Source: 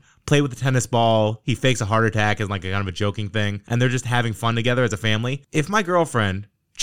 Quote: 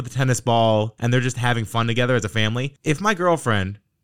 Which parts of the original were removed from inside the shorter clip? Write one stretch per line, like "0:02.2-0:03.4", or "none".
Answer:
0:01.4-0:03.6